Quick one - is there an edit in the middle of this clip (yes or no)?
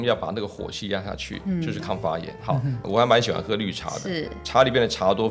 yes